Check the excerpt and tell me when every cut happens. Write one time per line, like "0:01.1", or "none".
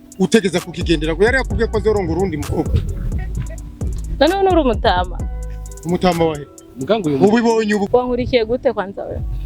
0:07.9

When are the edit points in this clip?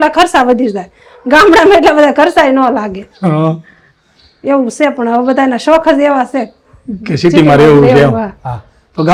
none

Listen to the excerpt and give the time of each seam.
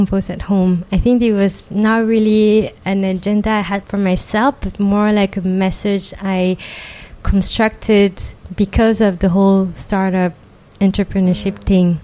none

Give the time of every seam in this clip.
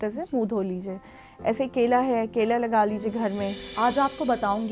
0:03.6

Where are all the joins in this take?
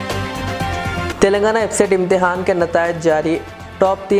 none

